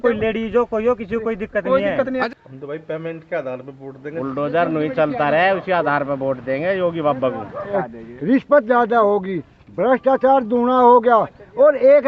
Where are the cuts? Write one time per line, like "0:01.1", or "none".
0:02.2
0:04.0
0:07.6